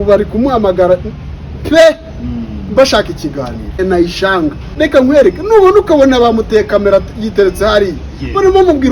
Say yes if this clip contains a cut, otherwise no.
yes